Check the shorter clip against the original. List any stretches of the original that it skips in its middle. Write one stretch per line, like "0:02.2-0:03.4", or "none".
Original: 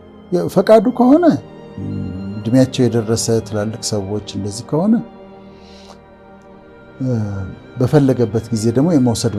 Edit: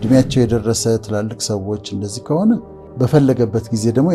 0:05.2-0:07.6